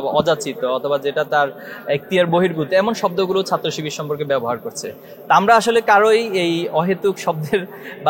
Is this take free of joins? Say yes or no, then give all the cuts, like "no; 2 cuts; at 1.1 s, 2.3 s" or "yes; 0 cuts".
yes; 0 cuts